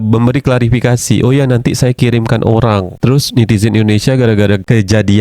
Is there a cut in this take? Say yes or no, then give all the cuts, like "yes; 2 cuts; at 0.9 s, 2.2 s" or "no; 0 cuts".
no; 0 cuts